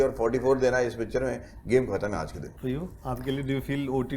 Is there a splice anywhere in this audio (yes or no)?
no